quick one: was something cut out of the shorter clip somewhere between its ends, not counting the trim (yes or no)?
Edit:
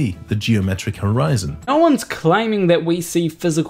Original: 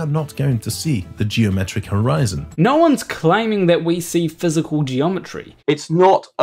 yes